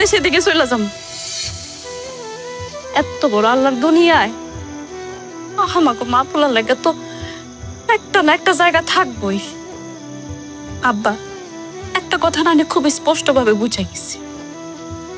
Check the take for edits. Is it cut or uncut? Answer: uncut